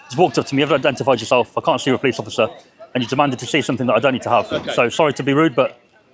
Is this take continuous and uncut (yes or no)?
yes